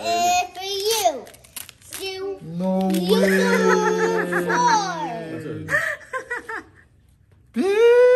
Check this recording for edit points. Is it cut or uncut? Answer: uncut